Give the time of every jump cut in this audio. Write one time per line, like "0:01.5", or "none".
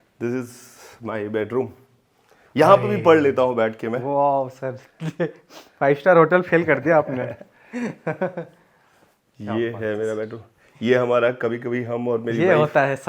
none